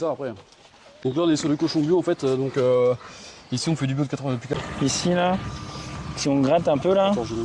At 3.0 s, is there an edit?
no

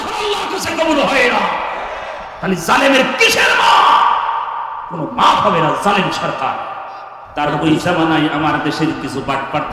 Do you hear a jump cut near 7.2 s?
yes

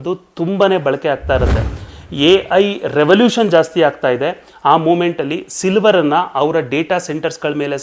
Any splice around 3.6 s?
no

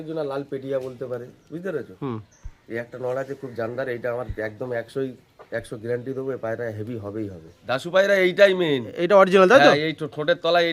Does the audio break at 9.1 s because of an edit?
no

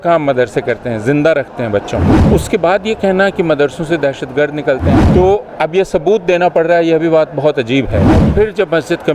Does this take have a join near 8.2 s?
yes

